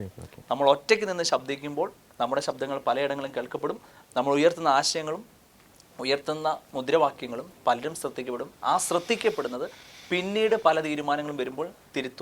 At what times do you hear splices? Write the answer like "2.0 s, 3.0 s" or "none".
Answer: none